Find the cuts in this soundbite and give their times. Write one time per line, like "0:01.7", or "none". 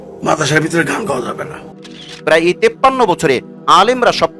0:01.8